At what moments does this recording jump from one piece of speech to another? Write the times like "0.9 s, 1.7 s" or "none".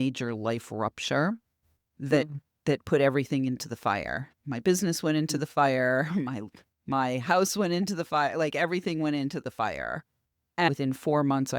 10.7 s